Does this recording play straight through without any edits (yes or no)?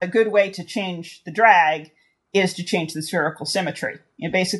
yes